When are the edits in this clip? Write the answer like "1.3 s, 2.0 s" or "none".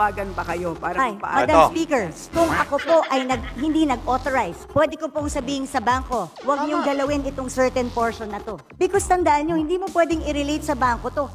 none